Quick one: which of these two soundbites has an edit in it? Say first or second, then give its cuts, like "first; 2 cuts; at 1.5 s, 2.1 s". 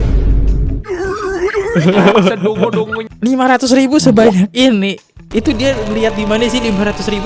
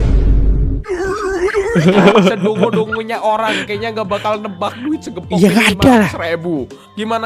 first; 1 cut; at 3.0 s